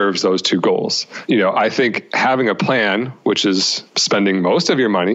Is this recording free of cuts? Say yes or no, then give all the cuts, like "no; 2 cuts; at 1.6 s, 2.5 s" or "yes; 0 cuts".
no; 2 cuts; at 1.1 s, 3.8 s